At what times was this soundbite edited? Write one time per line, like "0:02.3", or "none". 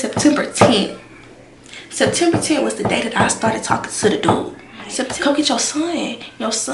0:05.1